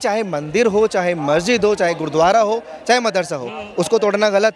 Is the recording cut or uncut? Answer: uncut